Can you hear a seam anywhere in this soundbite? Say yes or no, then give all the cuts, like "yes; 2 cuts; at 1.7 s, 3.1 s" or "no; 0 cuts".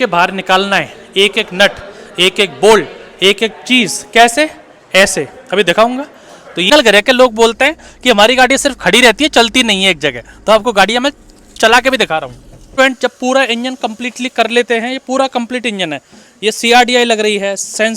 yes; 2 cuts; at 6.7 s, 12.7 s